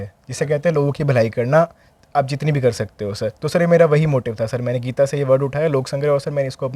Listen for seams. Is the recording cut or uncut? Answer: uncut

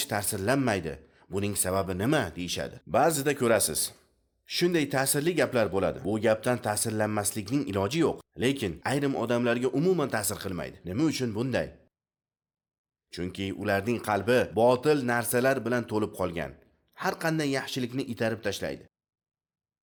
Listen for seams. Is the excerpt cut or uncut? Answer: uncut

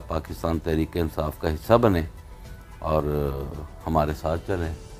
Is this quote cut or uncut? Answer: uncut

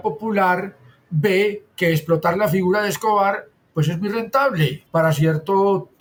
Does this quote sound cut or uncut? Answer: uncut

